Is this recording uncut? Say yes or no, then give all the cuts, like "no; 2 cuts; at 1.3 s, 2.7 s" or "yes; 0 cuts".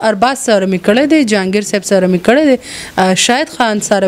yes; 0 cuts